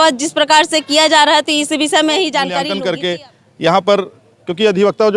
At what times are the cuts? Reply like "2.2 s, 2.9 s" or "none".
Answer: 2.6 s